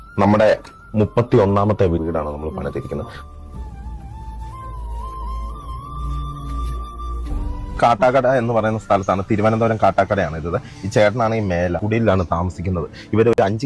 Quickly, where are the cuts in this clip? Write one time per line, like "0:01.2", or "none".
none